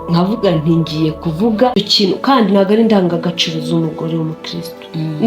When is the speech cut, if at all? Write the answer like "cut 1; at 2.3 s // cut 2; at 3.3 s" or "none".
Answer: cut 1; at 1.7 s